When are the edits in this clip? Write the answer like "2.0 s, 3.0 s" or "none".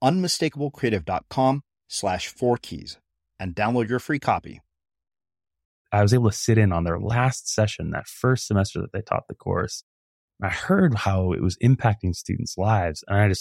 5.8 s

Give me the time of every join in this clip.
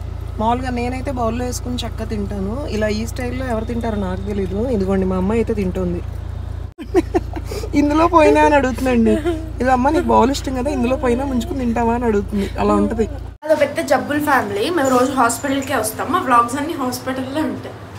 13.5 s

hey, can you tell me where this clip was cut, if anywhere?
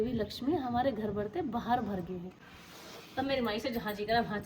2.3 s

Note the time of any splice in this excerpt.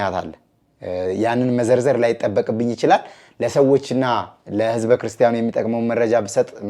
none

